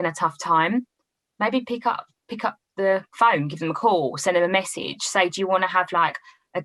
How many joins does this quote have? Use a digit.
0